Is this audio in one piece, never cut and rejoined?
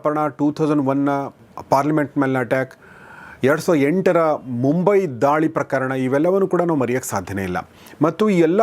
yes; 0 cuts

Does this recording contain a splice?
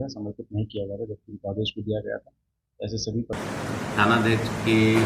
yes; 1 cut; at 3.4 s

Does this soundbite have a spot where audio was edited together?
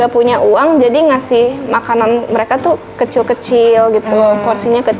no; 0 cuts

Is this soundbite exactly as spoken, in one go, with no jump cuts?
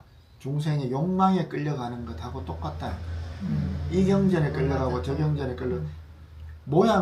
yes; 0 cuts

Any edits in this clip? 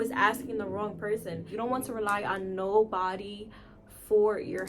yes; 1 cut; at 1.5 s

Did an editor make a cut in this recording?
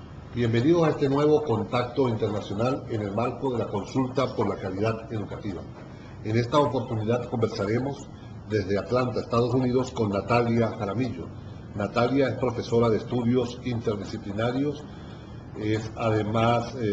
no; 0 cuts

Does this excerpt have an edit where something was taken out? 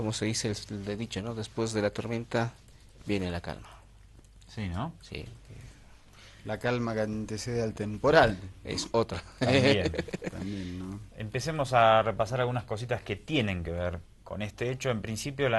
yes; 1 cut; at 1.1 s

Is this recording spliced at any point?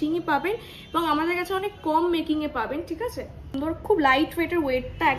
yes; 1 cut; at 3.6 s

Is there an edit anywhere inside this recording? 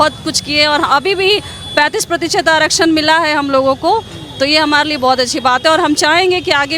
no; 0 cuts

